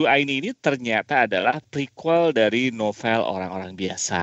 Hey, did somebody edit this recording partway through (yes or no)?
no